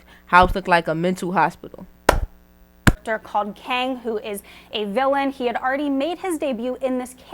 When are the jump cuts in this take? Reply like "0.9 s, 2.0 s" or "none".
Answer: 3.0 s